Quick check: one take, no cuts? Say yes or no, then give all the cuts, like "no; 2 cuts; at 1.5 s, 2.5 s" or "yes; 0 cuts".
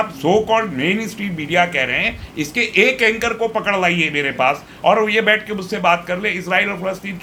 yes; 0 cuts